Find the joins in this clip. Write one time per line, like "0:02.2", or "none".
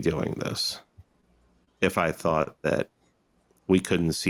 none